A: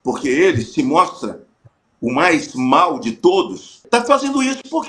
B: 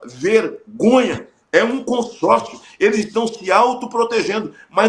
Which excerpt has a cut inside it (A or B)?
A